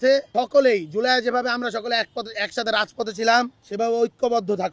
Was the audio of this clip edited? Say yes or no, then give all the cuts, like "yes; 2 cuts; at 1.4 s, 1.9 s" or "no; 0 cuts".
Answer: no; 0 cuts